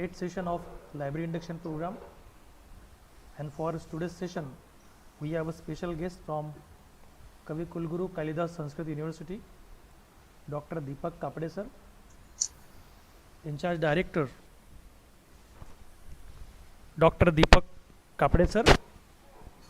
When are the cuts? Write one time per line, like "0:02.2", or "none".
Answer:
0:15.6